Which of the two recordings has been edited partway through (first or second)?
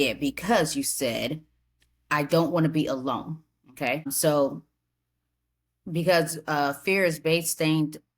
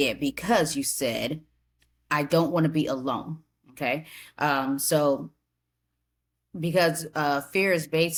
first